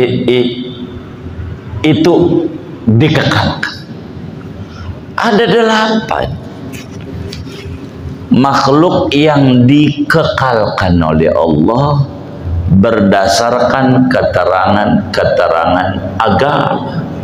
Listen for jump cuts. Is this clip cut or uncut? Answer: uncut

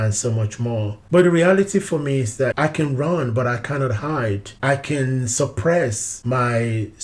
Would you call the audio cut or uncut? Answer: cut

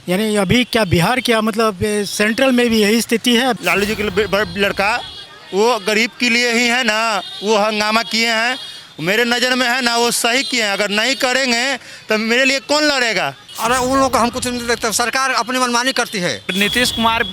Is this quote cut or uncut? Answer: cut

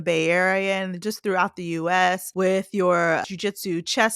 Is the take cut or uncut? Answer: cut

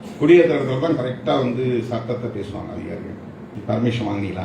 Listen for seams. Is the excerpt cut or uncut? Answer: cut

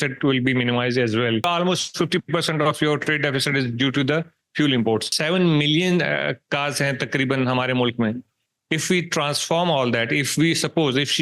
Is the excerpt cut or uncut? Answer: cut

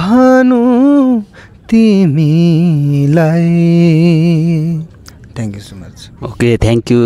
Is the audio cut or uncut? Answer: uncut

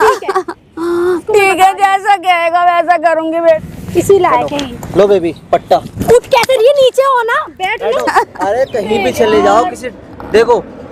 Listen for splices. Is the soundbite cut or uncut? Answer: cut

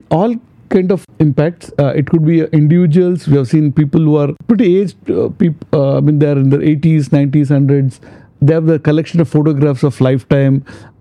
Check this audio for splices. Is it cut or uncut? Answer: cut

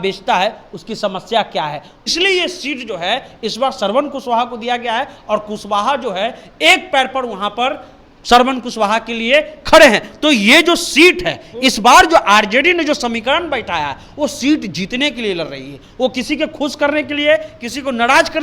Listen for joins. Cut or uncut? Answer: cut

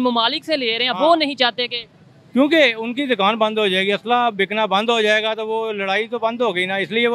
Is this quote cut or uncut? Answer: uncut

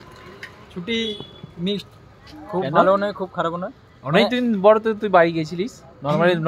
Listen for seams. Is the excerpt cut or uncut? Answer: uncut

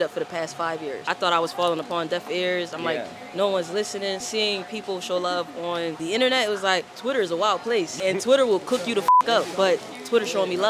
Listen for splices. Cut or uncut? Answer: cut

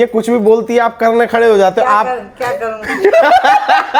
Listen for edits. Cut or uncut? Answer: uncut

